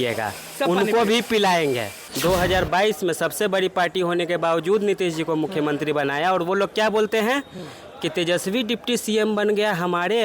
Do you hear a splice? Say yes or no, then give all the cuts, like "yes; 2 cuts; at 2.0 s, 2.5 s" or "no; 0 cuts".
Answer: yes; 1 cut; at 2.0 s